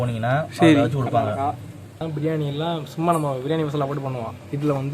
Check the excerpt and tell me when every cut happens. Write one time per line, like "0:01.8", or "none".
0:02.0